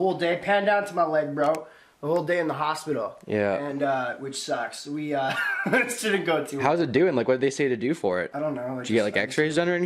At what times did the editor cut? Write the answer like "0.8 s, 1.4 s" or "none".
8.3 s